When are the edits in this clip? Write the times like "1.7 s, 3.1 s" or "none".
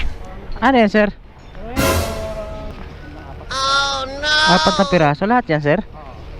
none